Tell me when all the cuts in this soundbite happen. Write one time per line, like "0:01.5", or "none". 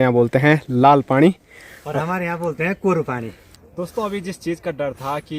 0:03.5